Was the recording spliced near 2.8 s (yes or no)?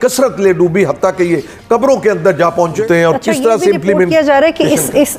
yes